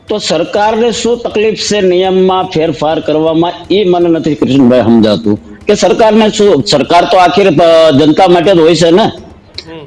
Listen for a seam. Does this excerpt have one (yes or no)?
no